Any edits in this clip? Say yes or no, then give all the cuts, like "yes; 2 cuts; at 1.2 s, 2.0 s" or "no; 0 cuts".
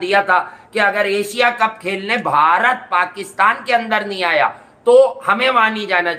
no; 0 cuts